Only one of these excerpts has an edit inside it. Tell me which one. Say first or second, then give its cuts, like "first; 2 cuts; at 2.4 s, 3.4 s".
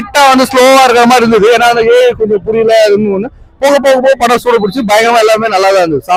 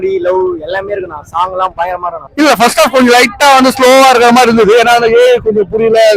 second; 1 cut; at 2.2 s